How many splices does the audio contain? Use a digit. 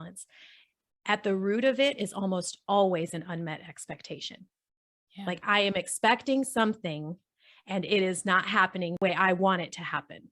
1